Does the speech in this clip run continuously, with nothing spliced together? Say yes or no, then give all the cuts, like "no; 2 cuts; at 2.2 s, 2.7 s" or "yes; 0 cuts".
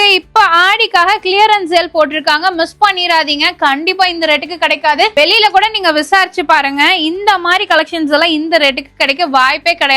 yes; 0 cuts